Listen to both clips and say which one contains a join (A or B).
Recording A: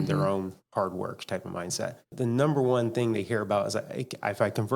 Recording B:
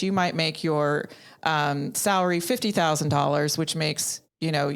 A